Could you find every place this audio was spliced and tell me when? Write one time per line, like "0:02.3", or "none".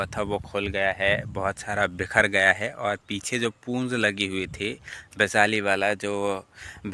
none